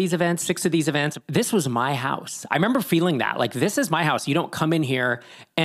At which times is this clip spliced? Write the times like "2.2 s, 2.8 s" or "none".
1.1 s